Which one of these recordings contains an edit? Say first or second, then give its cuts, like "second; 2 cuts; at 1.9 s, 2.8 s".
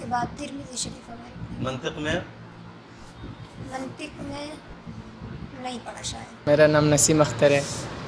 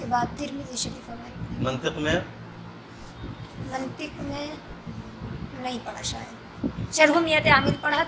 first; 1 cut; at 6.4 s